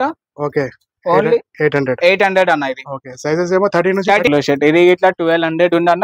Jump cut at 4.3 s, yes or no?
yes